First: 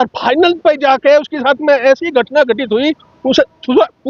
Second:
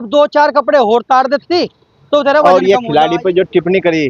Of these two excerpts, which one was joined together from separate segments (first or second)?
second